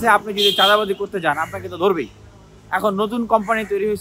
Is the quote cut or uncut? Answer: uncut